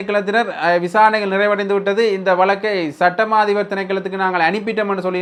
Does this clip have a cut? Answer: no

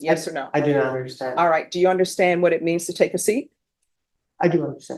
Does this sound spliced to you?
no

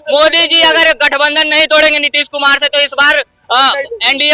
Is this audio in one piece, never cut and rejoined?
yes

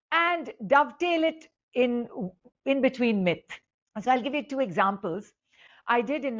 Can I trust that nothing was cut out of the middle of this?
yes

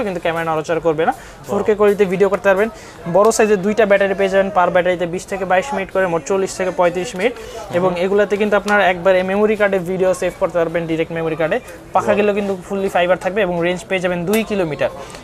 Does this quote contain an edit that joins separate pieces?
no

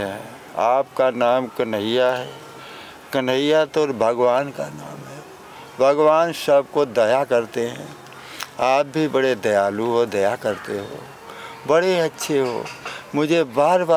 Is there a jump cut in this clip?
no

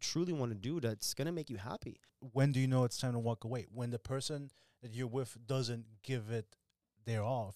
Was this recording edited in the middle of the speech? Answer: yes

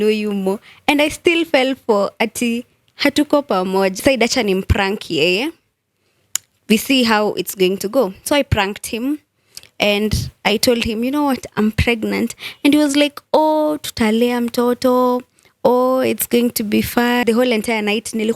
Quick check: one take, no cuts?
no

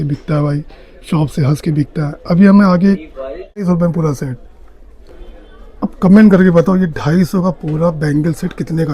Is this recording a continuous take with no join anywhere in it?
no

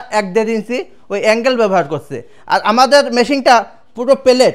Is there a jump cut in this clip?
no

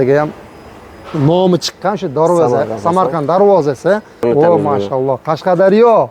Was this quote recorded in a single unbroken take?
no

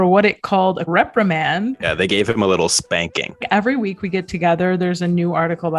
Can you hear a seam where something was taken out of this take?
yes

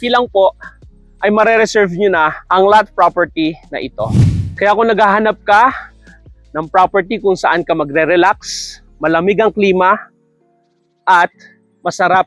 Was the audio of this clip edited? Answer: yes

